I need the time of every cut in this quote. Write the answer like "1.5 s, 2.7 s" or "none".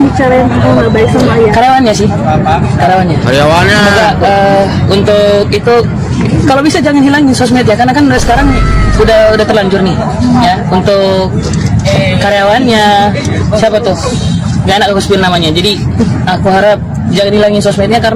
none